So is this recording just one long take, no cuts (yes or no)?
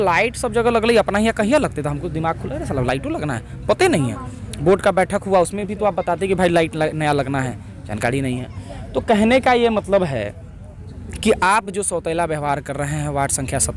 yes